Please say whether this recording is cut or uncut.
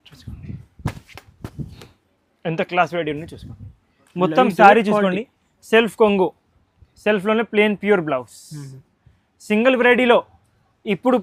uncut